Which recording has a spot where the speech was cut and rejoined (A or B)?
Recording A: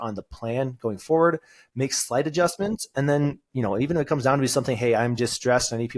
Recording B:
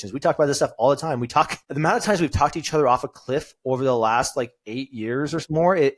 B